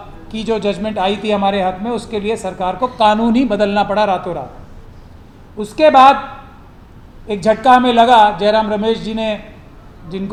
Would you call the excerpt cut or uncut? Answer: uncut